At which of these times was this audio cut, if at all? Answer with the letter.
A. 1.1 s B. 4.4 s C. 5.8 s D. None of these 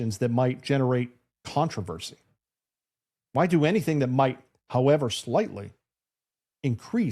D